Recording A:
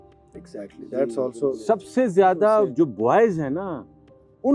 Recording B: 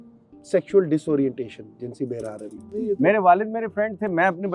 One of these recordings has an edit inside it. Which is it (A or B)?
B